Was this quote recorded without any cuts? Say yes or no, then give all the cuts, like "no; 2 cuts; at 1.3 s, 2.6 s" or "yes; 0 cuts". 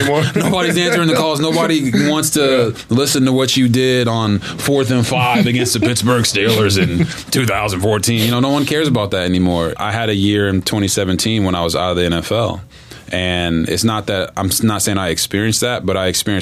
no; 1 cut; at 9.8 s